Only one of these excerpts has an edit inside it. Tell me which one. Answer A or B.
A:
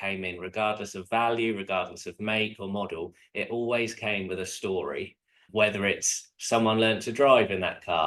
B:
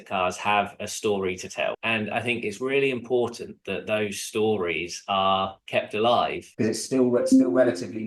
B